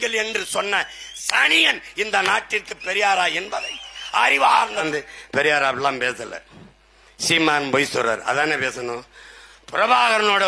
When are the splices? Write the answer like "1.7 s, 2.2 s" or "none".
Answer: 4.8 s

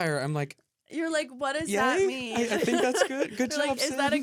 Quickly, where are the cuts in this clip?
none

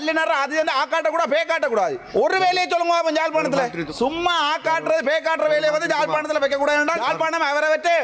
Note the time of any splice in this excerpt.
2.0 s, 3.8 s, 7.0 s

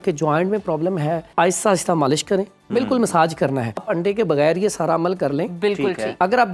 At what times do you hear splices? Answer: 1.3 s, 3.8 s

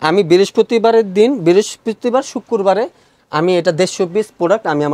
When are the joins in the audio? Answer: none

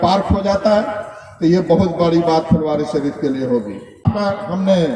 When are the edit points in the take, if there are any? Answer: 4.0 s

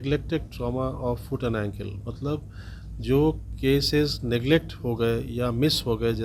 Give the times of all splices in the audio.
none

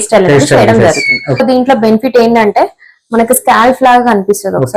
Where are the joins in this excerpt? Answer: 1.4 s

